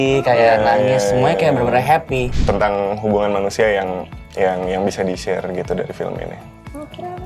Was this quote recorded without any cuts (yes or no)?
no